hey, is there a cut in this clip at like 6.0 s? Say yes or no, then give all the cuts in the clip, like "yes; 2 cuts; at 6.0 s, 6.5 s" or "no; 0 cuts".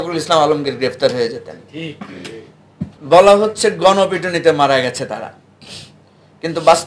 no; 1 cut; at 3.0 s